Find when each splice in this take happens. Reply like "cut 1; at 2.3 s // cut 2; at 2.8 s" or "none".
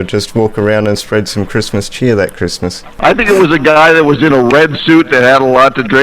cut 1; at 2.8 s